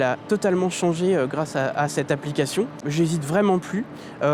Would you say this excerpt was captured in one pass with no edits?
no; 1 cut; at 2.8 s

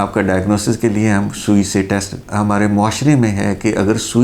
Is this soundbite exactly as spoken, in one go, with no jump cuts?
no; 1 cut; at 2.2 s

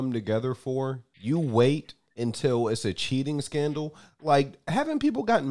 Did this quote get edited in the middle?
yes; 1 cut; at 1.1 s

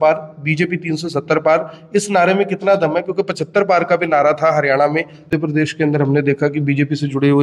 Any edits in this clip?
yes; 1 cut; at 5.3 s

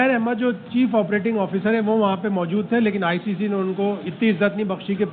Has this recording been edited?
no; 0 cuts

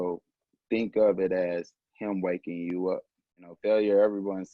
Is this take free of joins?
no; 1 cut; at 3.2 s

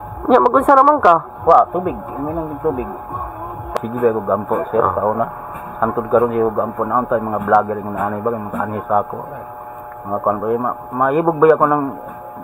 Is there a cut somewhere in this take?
yes; 1 cut; at 3.6 s

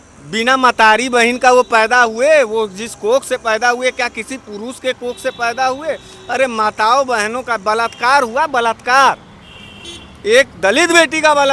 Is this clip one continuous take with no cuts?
yes; 0 cuts

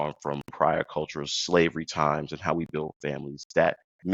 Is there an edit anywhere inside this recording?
no; 0 cuts

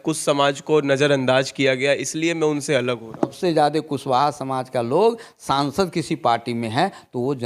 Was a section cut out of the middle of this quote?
yes; 1 cut; at 3.4 s

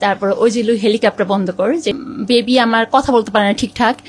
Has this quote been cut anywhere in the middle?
yes; 1 cut; at 1.9 s

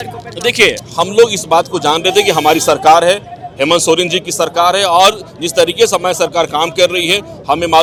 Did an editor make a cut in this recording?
no; 0 cuts

